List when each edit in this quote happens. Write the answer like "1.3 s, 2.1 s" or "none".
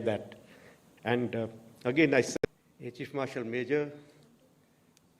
2.3 s